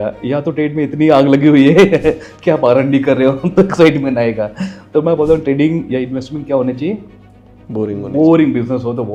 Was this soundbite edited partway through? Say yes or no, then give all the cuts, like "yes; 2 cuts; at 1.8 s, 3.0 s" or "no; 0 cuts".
no; 0 cuts